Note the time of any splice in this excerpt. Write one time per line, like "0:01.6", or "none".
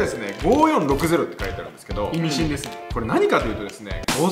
none